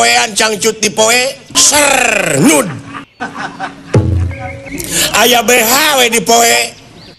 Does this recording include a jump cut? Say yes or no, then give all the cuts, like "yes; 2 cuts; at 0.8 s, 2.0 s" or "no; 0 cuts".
no; 0 cuts